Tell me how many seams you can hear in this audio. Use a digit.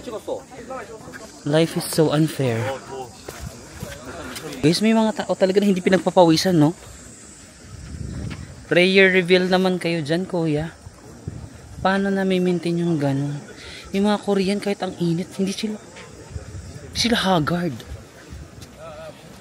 2